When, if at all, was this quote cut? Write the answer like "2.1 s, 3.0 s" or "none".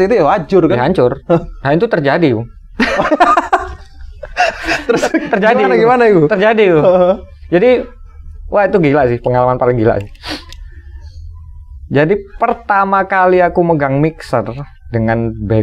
none